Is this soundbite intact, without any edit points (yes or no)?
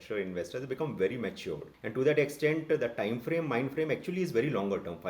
no